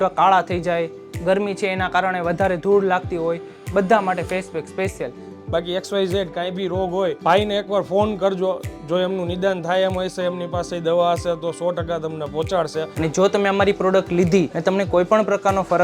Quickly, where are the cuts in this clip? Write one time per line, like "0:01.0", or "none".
0:05.3
0:07.2
0:12.9
0:14.5